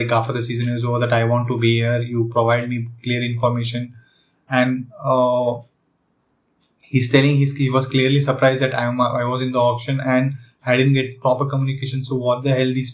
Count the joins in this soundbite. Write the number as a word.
zero